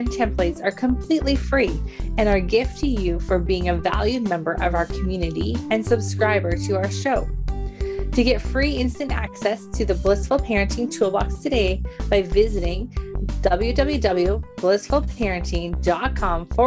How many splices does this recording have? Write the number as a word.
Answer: zero